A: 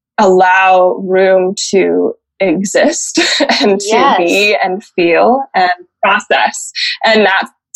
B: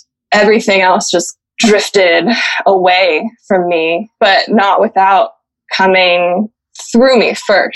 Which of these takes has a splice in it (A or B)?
B